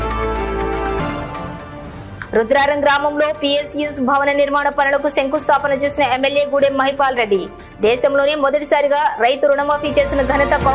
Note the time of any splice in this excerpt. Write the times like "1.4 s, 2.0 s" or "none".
1.0 s